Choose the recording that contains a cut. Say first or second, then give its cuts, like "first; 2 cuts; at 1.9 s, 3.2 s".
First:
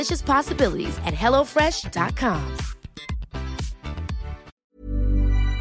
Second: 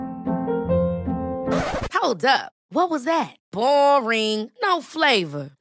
first; 1 cut; at 4.5 s